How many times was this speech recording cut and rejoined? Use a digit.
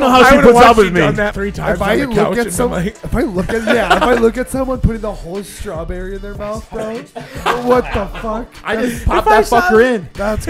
1